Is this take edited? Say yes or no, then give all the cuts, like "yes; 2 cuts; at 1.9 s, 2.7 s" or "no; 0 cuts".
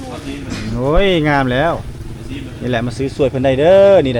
no; 0 cuts